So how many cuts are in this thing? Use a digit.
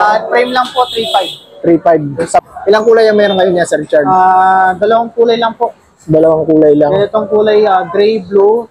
1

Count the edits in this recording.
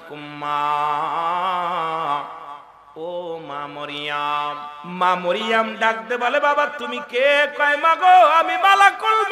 1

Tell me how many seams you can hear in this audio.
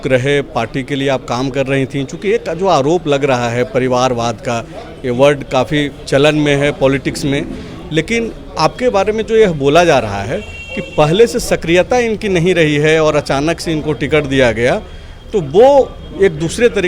0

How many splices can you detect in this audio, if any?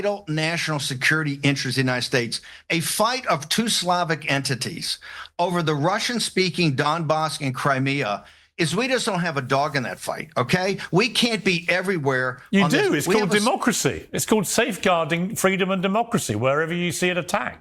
0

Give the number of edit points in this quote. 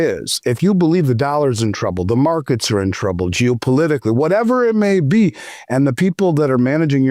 0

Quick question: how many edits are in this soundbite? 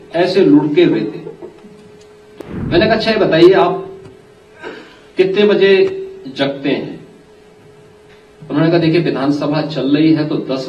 1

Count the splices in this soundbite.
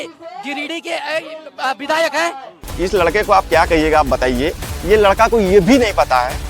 1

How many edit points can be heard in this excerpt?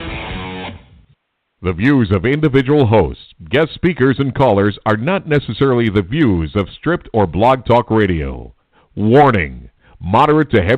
1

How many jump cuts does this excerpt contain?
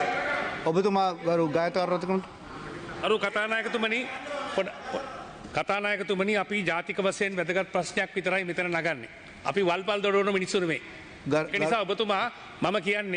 0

